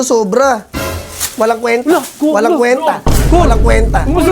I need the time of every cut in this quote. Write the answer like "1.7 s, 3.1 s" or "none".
none